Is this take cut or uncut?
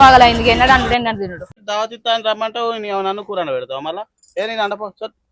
cut